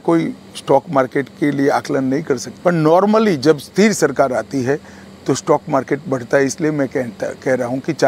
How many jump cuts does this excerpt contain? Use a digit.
1